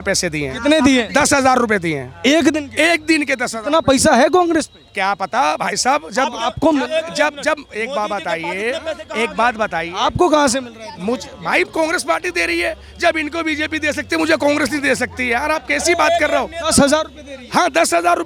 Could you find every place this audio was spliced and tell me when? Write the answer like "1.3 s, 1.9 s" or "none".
none